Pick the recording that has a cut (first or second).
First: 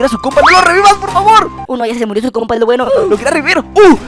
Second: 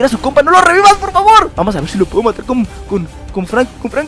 second